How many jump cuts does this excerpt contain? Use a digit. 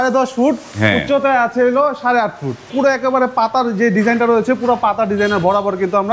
1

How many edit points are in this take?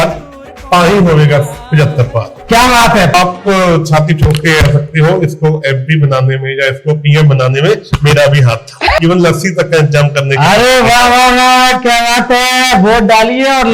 2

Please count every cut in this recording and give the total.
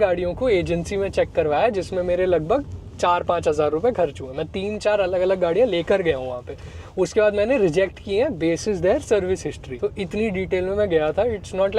1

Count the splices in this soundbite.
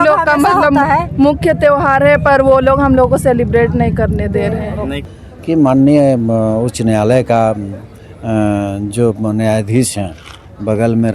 1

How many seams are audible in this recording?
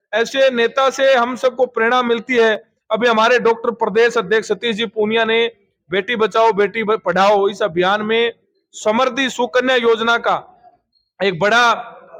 0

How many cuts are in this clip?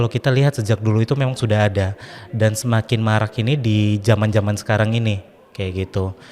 0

